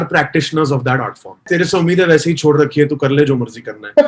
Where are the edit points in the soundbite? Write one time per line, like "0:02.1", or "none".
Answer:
0:01.5